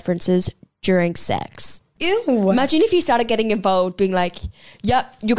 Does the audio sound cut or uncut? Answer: cut